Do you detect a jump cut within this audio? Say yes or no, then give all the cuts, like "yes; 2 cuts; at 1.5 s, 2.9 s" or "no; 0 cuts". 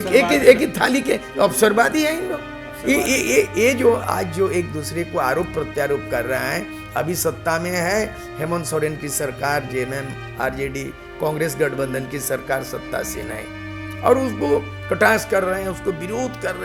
no; 0 cuts